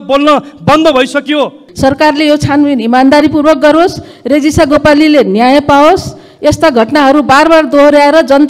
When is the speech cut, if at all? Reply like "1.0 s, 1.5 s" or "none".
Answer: 1.6 s